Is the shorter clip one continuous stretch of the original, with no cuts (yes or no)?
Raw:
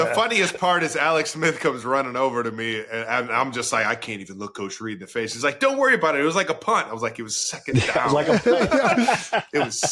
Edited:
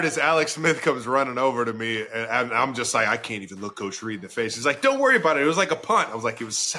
yes